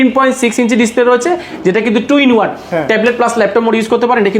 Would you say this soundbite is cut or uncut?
uncut